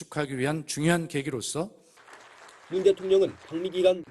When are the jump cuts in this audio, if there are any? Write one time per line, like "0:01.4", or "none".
0:01.7